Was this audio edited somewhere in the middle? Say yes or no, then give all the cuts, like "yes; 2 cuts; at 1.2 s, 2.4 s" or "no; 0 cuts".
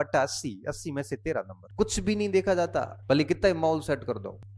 yes; 2 cuts; at 1.6 s, 2.9 s